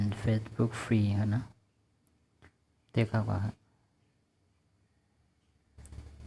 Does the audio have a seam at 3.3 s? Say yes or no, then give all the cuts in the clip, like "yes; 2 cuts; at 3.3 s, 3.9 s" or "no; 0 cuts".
yes; 1 cut; at 3.3 s